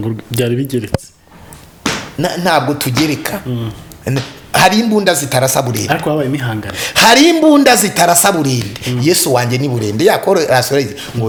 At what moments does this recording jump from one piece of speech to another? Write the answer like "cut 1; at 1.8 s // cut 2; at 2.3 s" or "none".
none